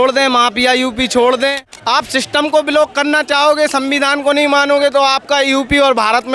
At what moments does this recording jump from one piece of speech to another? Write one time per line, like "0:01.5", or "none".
0:02.0